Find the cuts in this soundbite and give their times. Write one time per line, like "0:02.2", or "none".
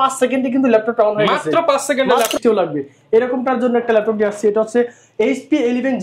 0:02.4

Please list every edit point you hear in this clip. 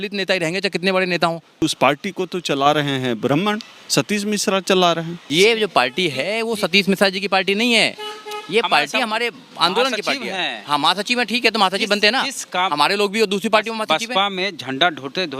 0:01.6
0:05.2

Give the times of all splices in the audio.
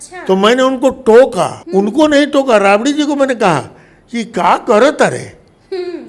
0:01.6

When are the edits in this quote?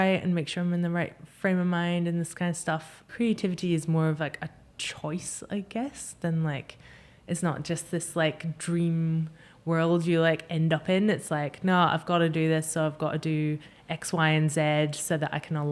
0:03.0

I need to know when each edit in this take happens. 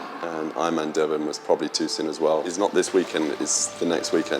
0:02.5

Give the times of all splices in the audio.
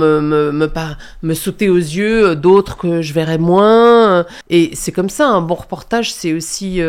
0:04.4

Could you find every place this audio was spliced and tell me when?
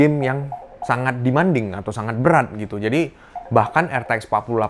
none

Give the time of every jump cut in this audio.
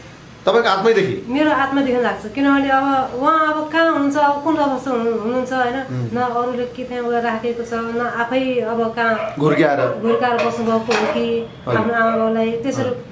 none

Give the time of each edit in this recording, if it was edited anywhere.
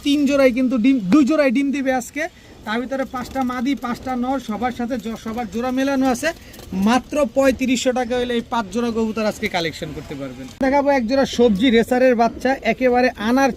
none

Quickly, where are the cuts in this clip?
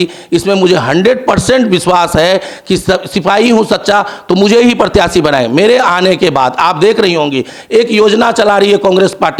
none

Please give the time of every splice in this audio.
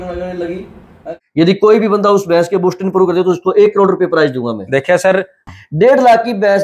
0:01.0
0:05.4

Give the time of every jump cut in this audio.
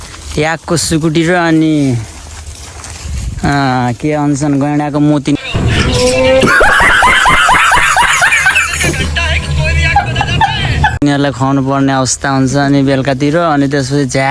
none

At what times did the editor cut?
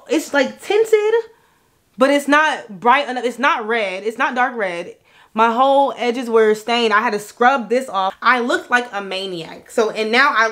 0:08.2

